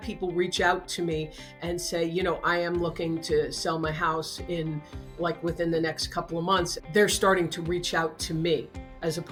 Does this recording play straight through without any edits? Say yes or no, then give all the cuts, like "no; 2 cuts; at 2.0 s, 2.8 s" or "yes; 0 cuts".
yes; 0 cuts